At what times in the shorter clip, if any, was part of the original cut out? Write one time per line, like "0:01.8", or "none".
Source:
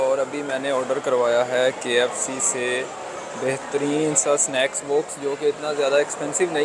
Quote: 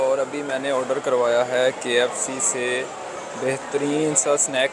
none